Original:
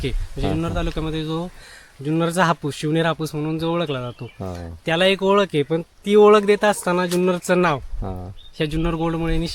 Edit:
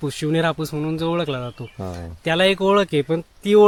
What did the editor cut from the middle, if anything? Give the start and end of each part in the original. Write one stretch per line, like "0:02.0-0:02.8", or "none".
none